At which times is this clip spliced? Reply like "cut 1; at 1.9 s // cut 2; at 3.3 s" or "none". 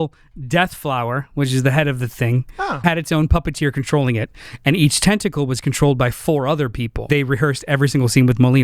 cut 1; at 2.8 s // cut 2; at 7.0 s